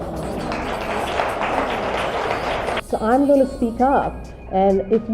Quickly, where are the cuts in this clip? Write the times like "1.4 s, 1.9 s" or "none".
2.8 s